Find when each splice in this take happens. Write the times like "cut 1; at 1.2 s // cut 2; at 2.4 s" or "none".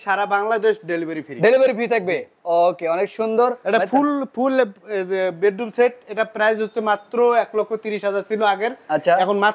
none